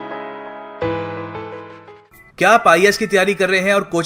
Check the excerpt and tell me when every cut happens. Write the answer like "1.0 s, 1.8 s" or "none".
2.1 s